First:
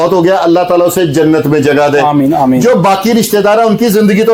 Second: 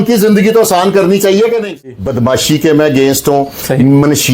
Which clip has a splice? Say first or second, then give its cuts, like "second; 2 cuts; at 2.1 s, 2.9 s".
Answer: second; 1 cut; at 1.9 s